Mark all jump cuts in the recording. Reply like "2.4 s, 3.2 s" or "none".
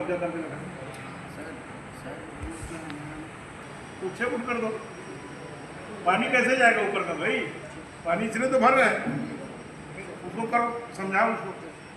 3.6 s

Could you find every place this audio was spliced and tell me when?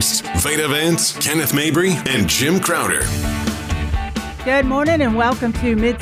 4.4 s

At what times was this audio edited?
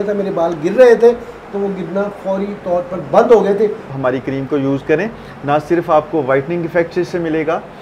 3.9 s

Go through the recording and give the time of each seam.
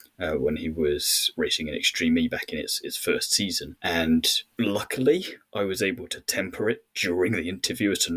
1.3 s, 3.7 s, 4.4 s

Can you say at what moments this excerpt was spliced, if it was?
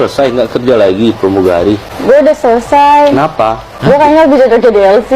1.9 s, 3.7 s

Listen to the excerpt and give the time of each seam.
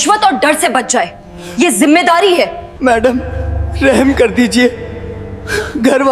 2.7 s

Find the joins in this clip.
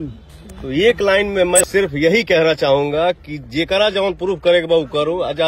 1.6 s

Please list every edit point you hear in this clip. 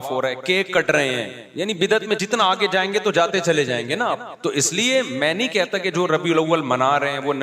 1.4 s, 4.3 s

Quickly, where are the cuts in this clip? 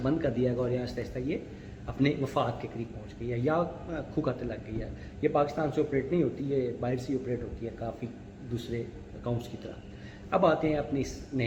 none

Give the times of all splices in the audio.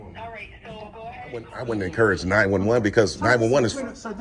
1.5 s

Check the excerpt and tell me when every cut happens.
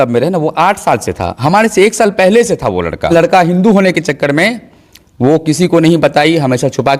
3.1 s

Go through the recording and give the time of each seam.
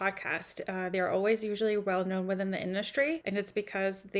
3.2 s

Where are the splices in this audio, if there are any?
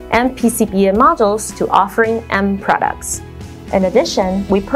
3.4 s

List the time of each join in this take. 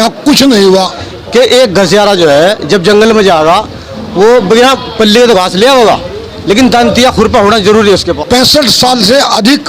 0.9 s, 8.1 s

